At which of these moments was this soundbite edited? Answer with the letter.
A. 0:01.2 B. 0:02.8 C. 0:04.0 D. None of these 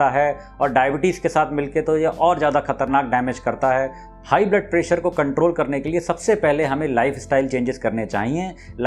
C